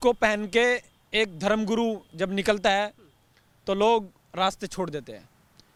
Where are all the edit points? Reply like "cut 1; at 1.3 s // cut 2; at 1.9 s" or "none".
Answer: none